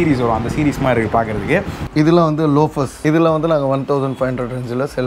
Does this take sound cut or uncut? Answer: cut